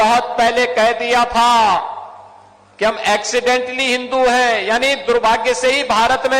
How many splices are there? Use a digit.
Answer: 0